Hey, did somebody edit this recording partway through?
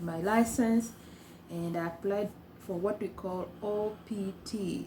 no; 0 cuts

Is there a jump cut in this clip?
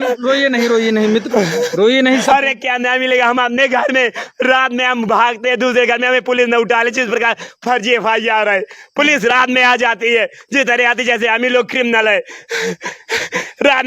yes; 1 cut; at 2.2 s

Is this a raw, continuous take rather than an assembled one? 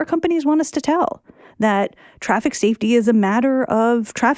yes; 0 cuts

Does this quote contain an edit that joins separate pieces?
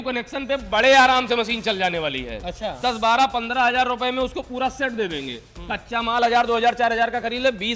yes; 1 cut; at 2.8 s

